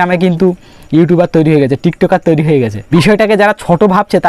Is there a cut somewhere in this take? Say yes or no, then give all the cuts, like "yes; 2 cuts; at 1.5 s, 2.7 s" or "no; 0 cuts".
yes; 1 cut; at 2.8 s